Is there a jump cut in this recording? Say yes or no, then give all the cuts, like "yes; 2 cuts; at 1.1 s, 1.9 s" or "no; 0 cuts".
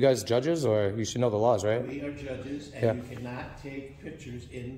no; 0 cuts